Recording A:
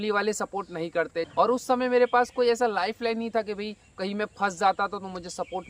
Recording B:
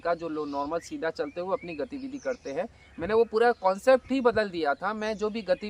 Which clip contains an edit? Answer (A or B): A